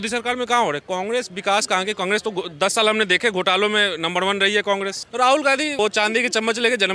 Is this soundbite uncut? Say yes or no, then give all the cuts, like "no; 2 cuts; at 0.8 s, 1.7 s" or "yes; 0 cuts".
no; 3 cuts; at 0.8 s, 5.0 s, 5.8 s